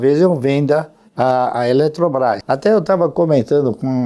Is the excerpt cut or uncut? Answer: cut